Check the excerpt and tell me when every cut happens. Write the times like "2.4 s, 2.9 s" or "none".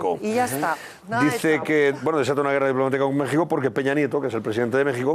3.7 s